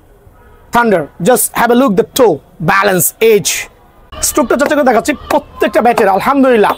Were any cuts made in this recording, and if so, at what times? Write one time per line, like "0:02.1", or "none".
none